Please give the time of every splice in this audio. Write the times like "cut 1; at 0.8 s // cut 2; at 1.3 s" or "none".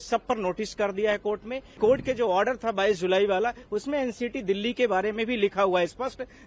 cut 1; at 1.8 s